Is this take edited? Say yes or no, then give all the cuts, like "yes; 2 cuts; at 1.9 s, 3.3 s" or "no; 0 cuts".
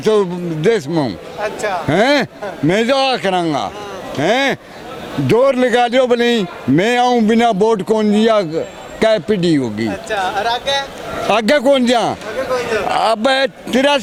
no; 0 cuts